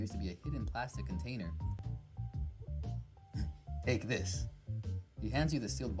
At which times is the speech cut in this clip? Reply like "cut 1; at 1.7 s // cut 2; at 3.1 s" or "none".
cut 1; at 1.8 s